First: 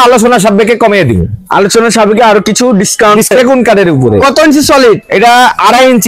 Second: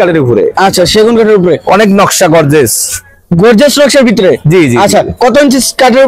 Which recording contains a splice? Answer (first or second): first